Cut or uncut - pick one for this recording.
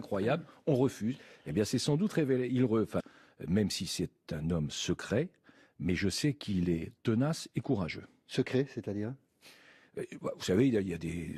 uncut